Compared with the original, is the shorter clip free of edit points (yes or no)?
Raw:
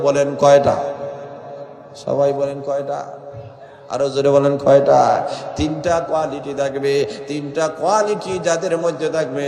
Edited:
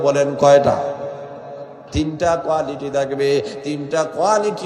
no